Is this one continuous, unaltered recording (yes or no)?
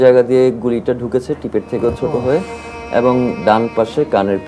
yes